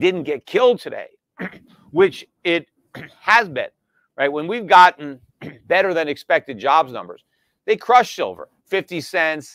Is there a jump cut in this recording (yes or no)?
no